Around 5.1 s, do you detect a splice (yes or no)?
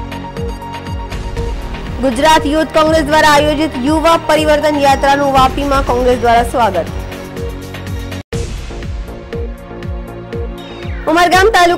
no